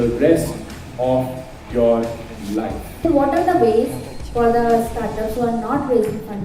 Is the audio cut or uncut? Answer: cut